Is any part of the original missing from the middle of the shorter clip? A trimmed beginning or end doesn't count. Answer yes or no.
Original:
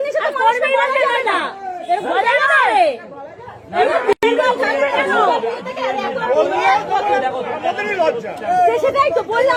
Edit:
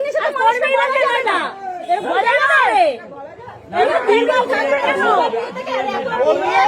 yes